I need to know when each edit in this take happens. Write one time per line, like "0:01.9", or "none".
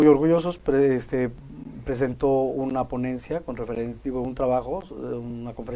0:01.5

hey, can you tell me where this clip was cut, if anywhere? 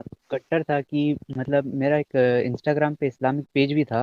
none

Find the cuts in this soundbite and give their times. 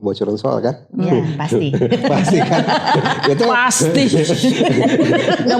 none

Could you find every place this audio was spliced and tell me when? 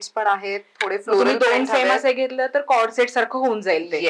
none

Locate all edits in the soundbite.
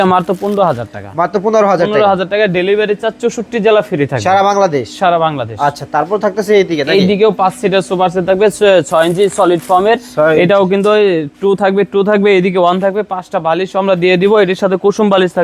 none

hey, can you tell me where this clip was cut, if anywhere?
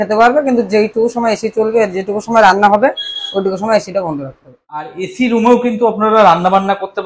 0:05.0

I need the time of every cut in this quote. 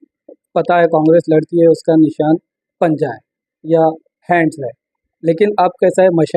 none

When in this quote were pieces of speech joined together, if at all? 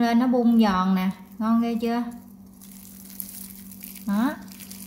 none

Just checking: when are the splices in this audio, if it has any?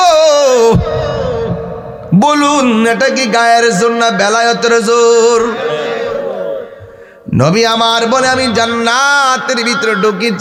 none

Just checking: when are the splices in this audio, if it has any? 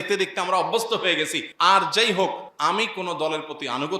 0:01.4
0:02.5

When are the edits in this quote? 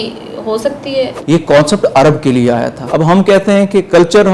0:01.2
0:02.8

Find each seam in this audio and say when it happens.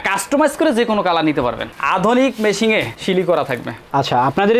0:01.7

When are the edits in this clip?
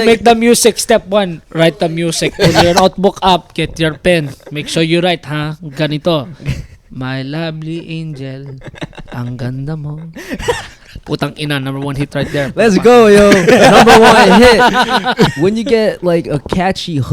0:15.3

